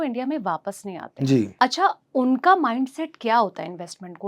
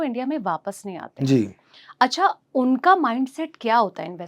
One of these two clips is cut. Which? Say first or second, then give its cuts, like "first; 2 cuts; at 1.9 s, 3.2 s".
first; 1 cut; at 1.5 s